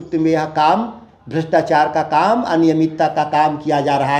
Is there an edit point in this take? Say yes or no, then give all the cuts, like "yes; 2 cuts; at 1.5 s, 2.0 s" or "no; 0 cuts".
no; 0 cuts